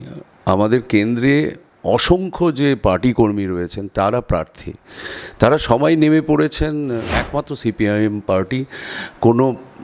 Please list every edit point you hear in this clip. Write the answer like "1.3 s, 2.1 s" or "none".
7.1 s